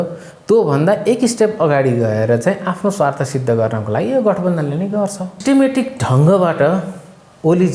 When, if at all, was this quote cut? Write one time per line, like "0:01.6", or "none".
0:05.4